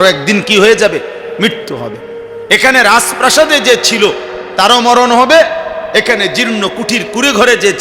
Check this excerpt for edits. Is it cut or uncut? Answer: uncut